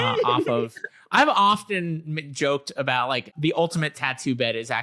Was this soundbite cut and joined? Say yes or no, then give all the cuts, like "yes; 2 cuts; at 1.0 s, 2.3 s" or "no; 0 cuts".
yes; 1 cut; at 3.3 s